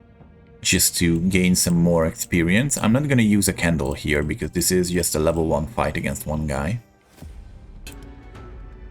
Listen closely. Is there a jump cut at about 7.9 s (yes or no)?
yes